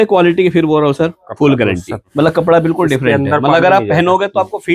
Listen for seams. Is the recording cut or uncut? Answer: cut